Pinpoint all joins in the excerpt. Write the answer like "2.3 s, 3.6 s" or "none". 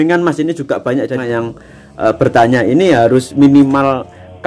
1.2 s